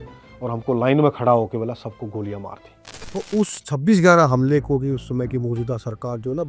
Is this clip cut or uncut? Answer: cut